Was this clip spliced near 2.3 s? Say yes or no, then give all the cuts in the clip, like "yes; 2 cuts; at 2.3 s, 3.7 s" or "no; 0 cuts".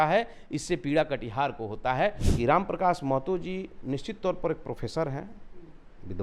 yes; 1 cut; at 2.3 s